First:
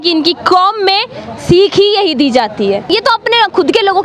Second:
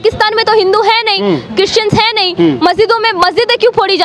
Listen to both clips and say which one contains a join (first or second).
first